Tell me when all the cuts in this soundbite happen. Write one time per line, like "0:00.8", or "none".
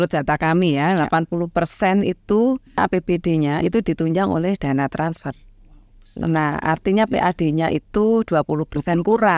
0:02.8